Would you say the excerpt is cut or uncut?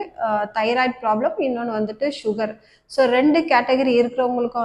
uncut